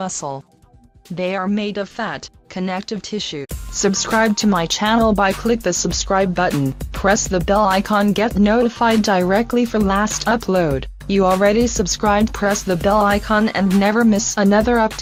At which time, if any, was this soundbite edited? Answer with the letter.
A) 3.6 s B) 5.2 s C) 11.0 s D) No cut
D